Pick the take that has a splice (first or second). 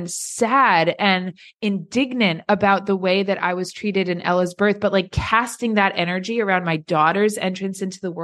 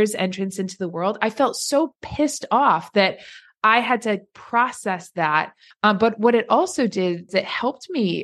second